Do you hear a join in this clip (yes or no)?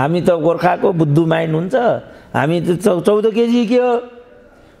no